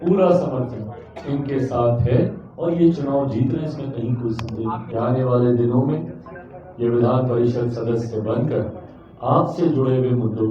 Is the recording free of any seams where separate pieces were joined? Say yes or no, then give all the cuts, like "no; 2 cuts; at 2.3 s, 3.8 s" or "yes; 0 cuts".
no; 1 cut; at 4.8 s